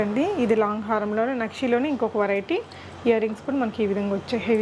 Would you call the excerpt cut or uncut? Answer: uncut